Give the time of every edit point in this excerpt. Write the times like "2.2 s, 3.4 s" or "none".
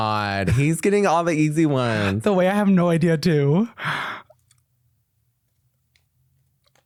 none